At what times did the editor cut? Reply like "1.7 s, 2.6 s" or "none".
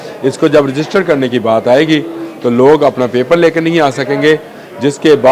none